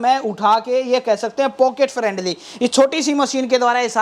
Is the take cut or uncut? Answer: uncut